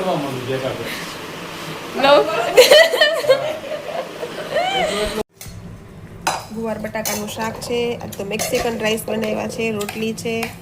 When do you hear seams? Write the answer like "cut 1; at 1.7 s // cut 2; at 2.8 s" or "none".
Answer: cut 1; at 5.3 s

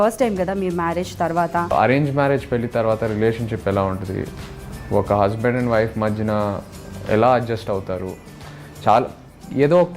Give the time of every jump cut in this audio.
cut 1; at 1.7 s

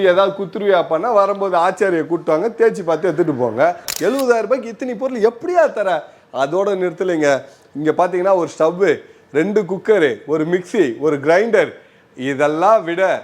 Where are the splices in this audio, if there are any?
cut 1; at 3.9 s

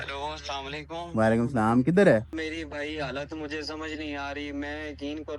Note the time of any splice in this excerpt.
cut 1; at 2.3 s

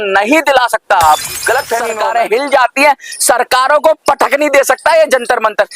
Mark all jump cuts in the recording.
cut 1; at 1.9 s

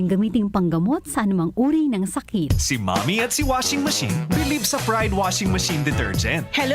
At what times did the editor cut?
cut 1; at 2.5 s

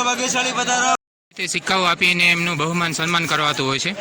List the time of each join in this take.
cut 1; at 1.0 s

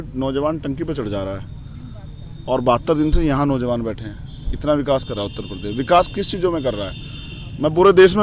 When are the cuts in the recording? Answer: none

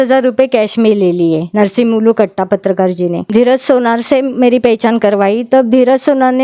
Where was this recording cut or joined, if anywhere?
cut 1; at 3.2 s

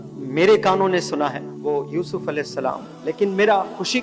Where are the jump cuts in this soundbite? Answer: cut 1; at 1.5 s // cut 2; at 2.9 s

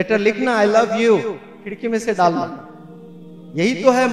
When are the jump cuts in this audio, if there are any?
none

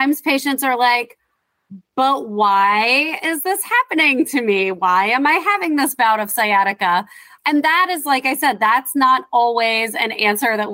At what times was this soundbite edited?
cut 1; at 7.2 s

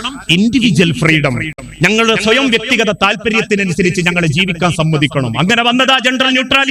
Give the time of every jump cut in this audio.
none

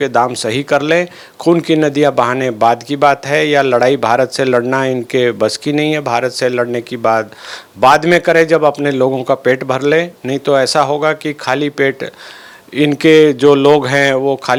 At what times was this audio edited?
none

